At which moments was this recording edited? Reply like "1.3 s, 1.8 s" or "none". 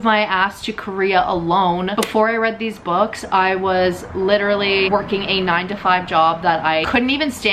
1.9 s